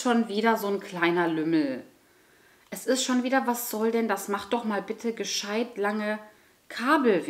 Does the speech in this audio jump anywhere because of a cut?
no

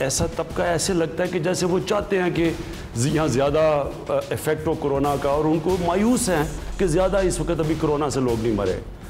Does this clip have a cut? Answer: no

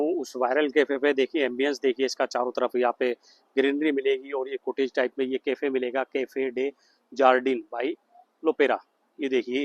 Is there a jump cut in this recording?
no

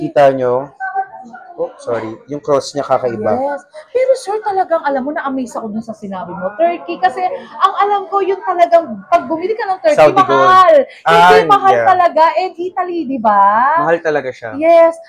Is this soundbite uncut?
yes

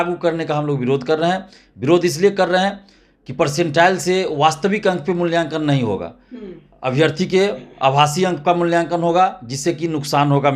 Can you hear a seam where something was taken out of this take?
no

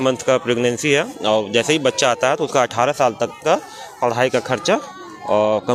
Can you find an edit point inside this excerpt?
no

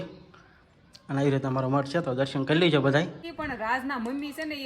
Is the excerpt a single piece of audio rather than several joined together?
no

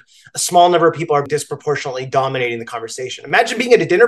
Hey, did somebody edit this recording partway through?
yes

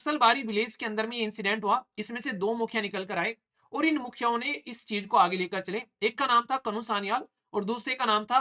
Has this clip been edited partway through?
no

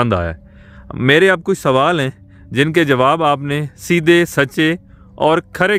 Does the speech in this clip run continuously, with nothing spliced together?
yes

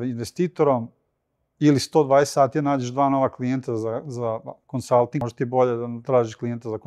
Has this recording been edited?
yes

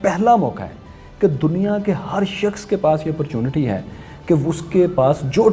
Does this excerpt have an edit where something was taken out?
no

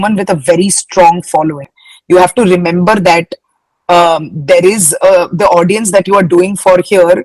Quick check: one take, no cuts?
no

